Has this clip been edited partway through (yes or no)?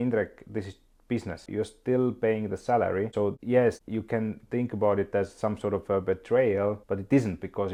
no